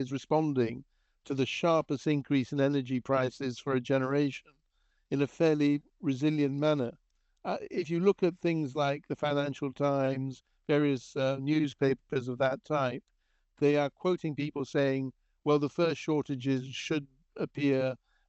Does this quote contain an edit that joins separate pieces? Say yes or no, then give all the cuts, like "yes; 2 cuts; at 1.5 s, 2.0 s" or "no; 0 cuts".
no; 0 cuts